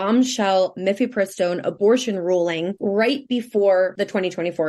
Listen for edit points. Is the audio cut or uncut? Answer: cut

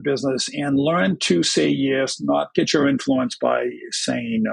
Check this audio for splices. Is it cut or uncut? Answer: cut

